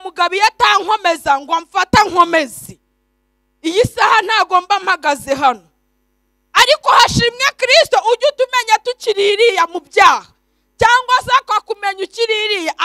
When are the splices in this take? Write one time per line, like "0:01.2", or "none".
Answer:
none

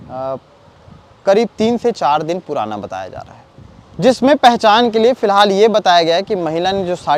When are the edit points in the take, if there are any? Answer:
0:04.0

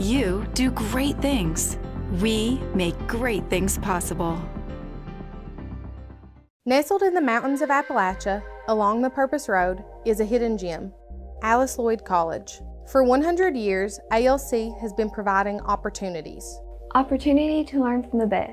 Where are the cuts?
0:06.4

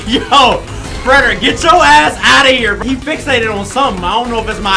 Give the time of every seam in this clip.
0:02.8

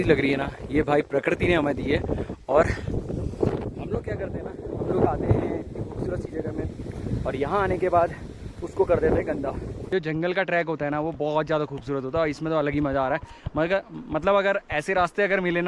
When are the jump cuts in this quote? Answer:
0:09.7

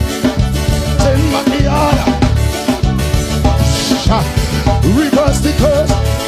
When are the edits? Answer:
none

